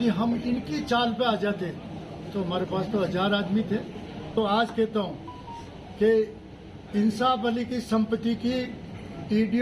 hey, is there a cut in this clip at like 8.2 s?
no; 1 cut; at 4.3 s

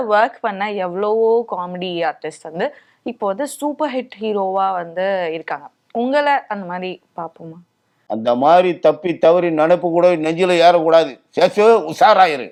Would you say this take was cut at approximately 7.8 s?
no; 0 cuts

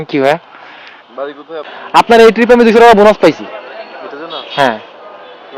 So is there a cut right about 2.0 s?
yes; 1 cut; at 2.0 s

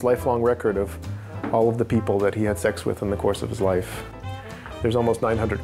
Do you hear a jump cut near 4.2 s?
yes; 1 cut; at 4.2 s

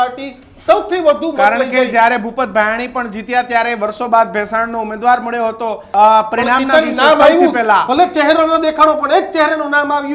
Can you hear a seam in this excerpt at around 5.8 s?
yes; 1 cut; at 5.8 s

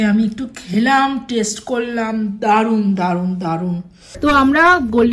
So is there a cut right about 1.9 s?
no; 1 cut; at 4.0 s

